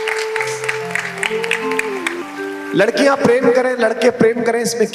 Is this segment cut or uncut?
cut